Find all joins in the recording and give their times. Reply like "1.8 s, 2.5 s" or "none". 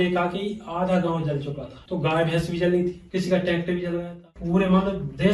1.7 s, 4.3 s